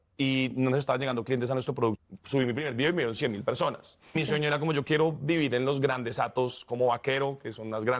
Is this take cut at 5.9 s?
no; 2 cuts; at 2.1 s, 4.2 s

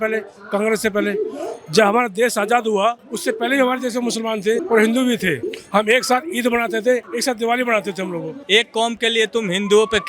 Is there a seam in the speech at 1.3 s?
no; 5 cuts; at 3.1 s, 4.6 s, 5.5 s, 7.1 s, 8.3 s

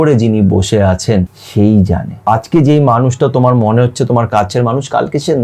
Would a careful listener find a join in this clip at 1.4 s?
yes; 2 cuts; at 1.4 s, 2.1 s

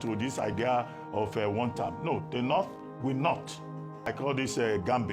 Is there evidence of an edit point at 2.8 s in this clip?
no; 1 cut; at 4.1 s

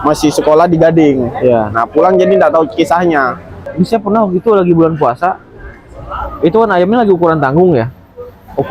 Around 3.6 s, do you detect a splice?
yes; 1 cut; at 3.6 s

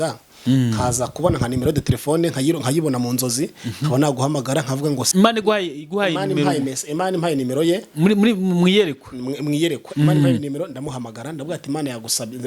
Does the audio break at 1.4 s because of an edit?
no; 1 cut; at 5.1 s

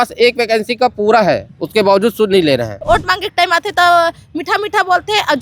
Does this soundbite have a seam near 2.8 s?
yes; 2 cuts; at 1.5 s, 2.8 s

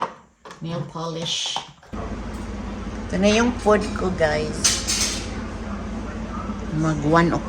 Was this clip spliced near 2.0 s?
yes; 1 cut; at 2.0 s

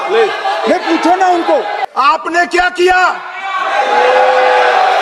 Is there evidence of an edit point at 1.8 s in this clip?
yes; 1 cut; at 1.8 s

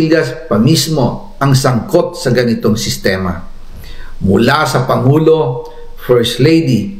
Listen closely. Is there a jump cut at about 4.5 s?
no; 1 cut; at 2.1 s

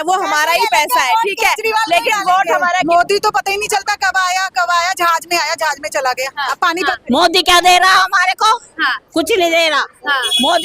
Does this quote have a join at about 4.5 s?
no; 2 cuts; at 2.8 s, 6.8 s

